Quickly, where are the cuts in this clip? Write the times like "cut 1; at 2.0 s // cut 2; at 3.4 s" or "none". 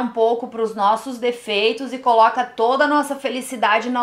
none